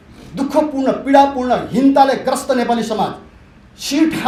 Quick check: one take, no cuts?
yes; 0 cuts

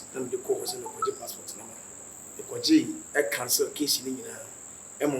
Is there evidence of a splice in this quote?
yes; 1 cut; at 2.0 s

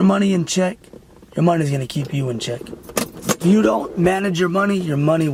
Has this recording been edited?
no; 0 cuts

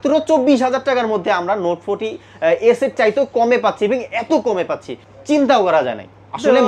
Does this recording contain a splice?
no; 0 cuts

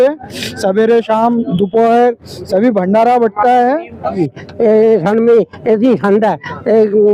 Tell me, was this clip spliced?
yes; 1 cut; at 4.2 s

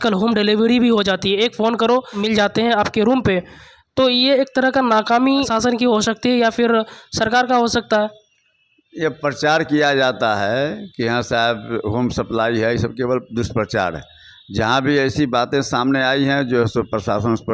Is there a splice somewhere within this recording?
yes; 2 cuts; at 2.3 s, 5.5 s

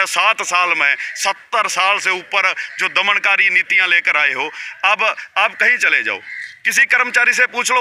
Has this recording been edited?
no; 0 cuts

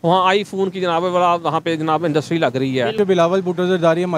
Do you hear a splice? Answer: yes; 1 cut; at 3.0 s

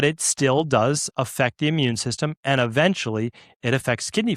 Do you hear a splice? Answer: no; 0 cuts

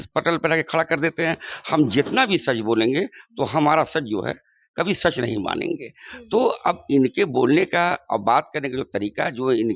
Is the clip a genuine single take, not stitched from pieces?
yes; 0 cuts

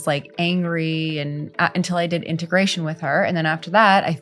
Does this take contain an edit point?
no; 0 cuts

